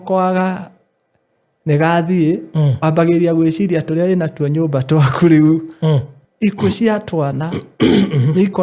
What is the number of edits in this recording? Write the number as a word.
one